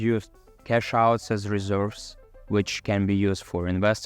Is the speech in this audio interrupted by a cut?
no; 0 cuts

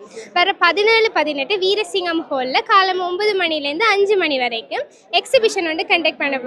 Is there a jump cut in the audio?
no; 0 cuts

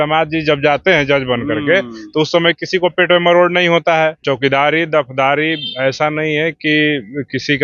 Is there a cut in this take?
yes; 1 cut; at 4.2 s

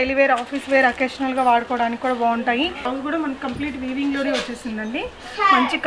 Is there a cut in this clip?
yes; 1 cut; at 2.9 s

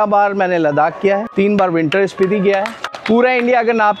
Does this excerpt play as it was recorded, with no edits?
no; 2 cuts; at 1.3 s, 2.9 s

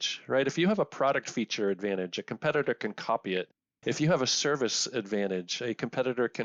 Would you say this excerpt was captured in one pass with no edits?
yes; 0 cuts

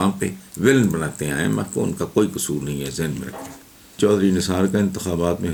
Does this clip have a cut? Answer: no; 0 cuts

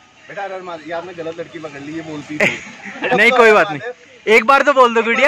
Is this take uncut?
yes; 0 cuts

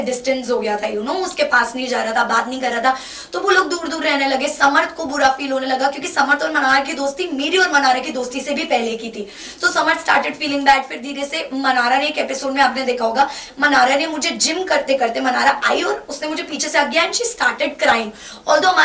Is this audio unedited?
yes; 0 cuts

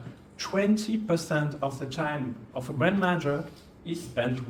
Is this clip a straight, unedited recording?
yes; 0 cuts

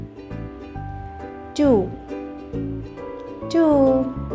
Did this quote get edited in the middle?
no; 0 cuts

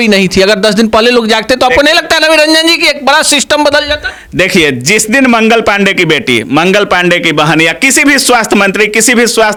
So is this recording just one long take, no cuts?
yes; 0 cuts

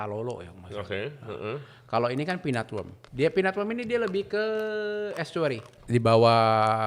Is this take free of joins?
no; 2 cuts; at 3.0 s, 5.8 s

